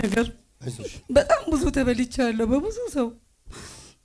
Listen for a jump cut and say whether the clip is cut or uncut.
uncut